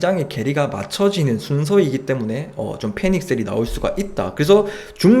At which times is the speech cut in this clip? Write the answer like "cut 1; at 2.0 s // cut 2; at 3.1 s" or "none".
none